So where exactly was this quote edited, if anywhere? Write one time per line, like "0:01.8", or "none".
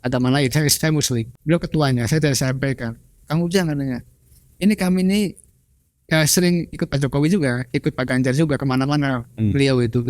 0:01.3